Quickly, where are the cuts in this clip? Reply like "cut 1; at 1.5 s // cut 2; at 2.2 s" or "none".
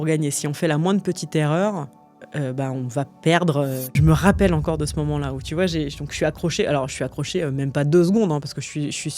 cut 1; at 4.0 s